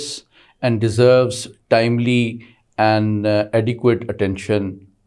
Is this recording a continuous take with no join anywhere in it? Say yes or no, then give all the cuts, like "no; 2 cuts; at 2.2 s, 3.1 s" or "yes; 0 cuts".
yes; 0 cuts